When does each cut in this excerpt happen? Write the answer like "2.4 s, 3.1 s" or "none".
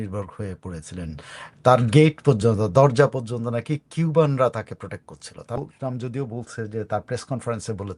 5.6 s